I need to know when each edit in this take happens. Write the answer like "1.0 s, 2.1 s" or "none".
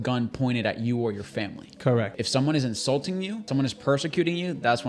2.2 s, 3.5 s